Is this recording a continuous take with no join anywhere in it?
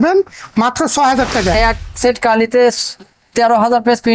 no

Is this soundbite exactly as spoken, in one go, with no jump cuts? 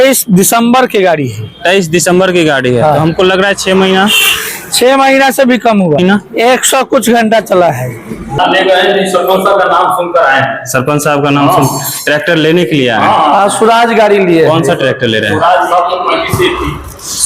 no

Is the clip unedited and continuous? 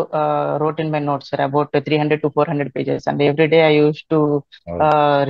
yes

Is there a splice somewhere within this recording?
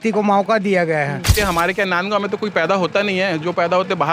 yes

